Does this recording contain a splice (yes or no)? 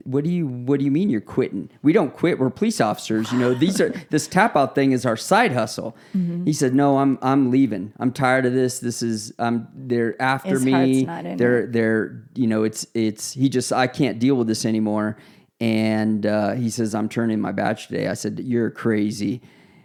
no